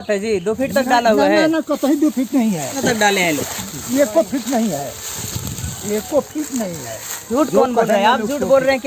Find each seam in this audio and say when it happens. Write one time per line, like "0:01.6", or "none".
0:02.8
0:07.3